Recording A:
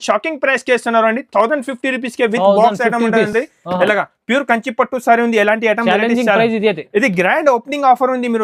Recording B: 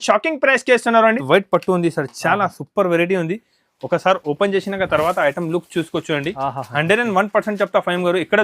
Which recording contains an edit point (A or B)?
B